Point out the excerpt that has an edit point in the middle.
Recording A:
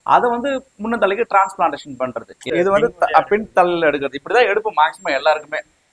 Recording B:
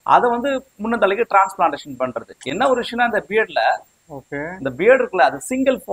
A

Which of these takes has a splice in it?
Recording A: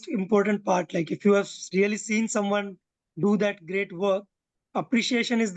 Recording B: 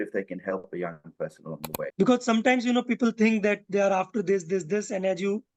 B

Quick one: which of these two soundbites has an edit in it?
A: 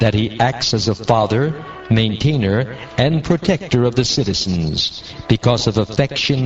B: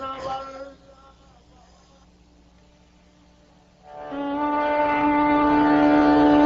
B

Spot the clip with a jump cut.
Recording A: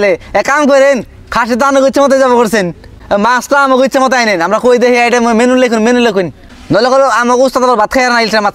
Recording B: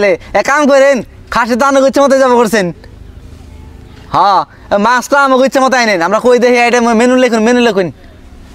A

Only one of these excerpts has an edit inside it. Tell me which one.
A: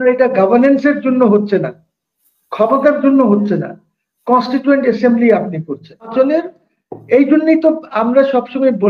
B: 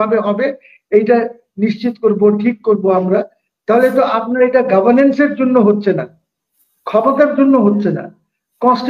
A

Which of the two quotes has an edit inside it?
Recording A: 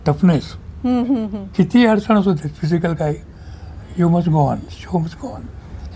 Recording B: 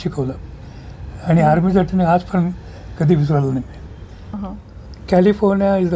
B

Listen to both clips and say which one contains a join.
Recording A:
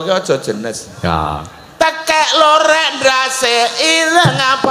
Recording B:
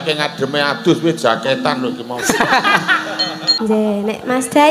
B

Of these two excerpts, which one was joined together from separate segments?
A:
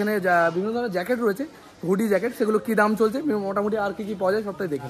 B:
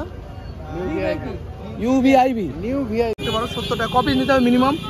B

